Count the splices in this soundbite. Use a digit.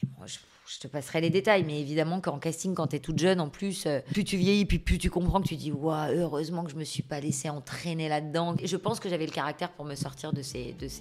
2